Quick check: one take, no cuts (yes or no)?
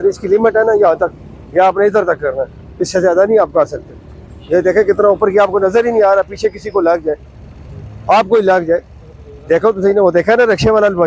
yes